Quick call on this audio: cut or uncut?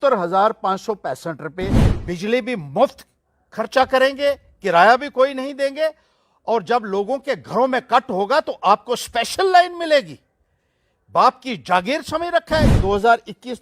cut